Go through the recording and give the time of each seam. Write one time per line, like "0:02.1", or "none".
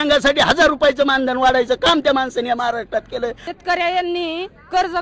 0:03.4